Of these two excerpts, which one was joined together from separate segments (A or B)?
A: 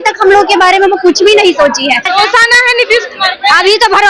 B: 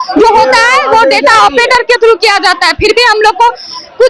A